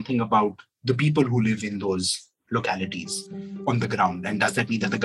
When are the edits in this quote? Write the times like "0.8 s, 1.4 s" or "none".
3.6 s